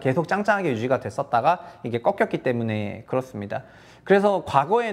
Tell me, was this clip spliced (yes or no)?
no